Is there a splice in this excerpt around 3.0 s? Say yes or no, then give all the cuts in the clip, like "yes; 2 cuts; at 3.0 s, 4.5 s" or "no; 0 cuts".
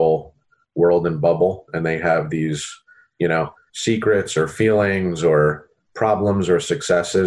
no; 0 cuts